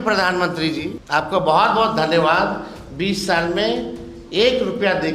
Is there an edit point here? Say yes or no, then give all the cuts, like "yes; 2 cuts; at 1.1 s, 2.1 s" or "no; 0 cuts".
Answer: yes; 1 cut; at 1.0 s